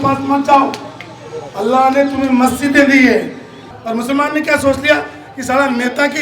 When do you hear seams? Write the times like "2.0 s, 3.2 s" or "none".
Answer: 3.6 s